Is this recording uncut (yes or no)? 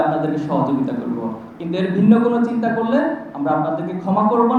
yes